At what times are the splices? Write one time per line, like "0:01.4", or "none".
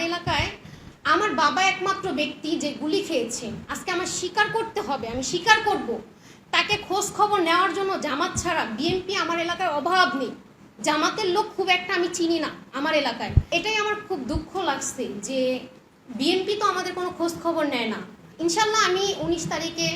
0:13.5
0:18.3